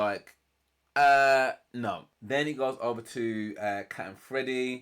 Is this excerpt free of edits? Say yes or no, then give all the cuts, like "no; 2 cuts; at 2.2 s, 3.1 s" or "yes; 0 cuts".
no; 1 cut; at 2.1 s